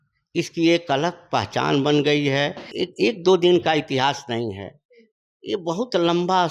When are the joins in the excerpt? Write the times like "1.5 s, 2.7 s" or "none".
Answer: 2.6 s